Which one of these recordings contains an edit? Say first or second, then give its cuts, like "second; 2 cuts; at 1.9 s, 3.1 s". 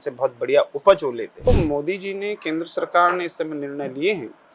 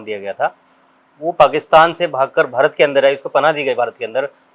first; 1 cut; at 1.5 s